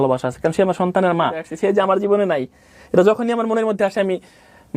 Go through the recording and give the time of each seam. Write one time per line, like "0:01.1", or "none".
0:01.5